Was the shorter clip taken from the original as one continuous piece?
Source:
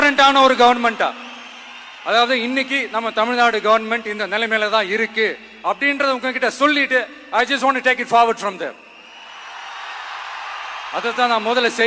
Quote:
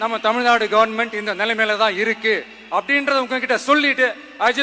yes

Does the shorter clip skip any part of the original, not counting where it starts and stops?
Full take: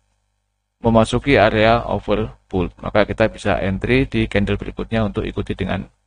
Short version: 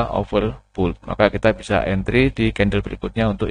no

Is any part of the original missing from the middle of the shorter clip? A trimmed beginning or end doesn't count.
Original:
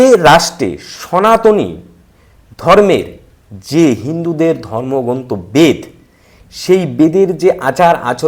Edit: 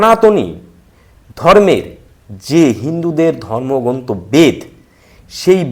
no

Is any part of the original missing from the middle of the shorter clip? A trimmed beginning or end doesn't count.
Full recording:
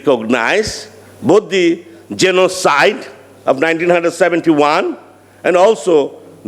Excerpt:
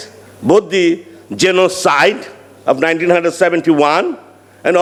no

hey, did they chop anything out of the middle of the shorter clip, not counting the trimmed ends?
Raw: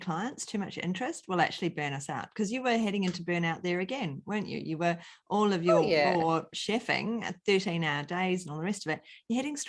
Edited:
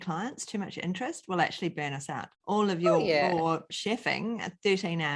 yes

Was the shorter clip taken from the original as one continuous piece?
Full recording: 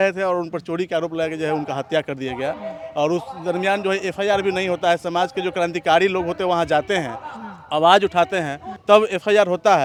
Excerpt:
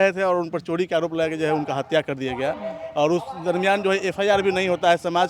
yes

